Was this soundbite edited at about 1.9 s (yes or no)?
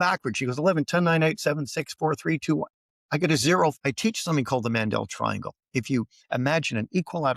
no